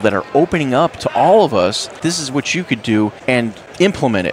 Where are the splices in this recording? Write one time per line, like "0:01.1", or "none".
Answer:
0:02.0
0:03.3